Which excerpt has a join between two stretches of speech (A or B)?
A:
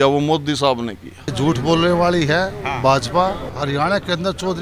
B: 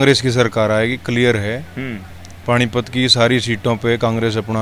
A